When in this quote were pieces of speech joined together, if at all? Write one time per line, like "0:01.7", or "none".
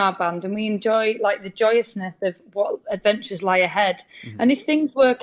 none